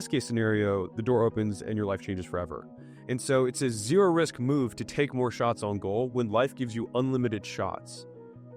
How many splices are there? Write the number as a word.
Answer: one